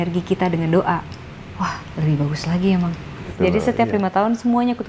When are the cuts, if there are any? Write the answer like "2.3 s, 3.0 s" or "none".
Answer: 3.3 s